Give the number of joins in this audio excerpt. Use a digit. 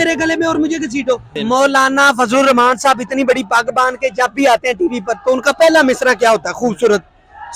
1